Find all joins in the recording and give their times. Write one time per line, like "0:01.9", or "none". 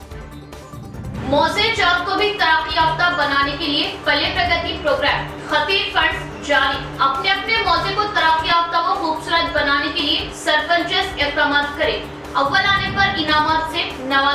0:00.9